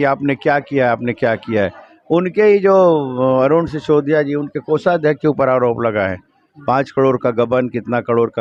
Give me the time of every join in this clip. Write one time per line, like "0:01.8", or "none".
none